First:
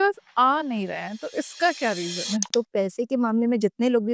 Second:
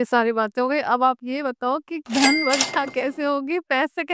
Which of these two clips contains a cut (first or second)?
first